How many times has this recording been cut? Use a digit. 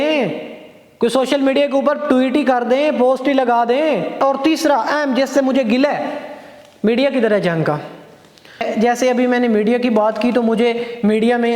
2